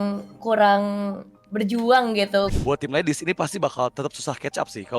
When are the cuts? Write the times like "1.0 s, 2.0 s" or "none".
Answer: 2.5 s